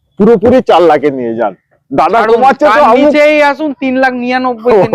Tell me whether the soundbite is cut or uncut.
uncut